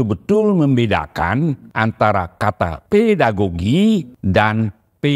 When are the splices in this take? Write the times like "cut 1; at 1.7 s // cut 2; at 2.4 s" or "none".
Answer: cut 1; at 1.6 s // cut 2; at 2.8 s // cut 3; at 4.1 s